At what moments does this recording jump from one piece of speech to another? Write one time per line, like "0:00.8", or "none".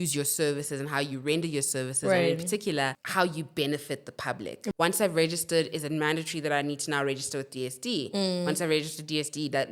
0:03.0
0:04.6